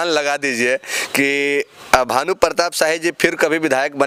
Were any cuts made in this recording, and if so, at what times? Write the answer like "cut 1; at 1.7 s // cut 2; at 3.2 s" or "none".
none